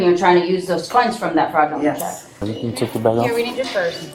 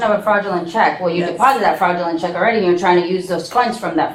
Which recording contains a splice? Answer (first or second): first